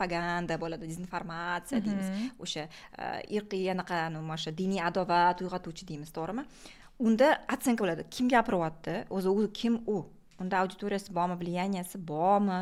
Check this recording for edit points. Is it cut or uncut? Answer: uncut